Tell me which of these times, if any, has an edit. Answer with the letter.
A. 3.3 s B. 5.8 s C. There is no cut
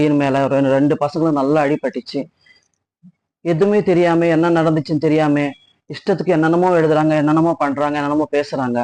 C